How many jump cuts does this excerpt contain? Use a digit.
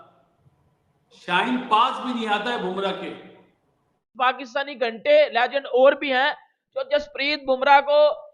1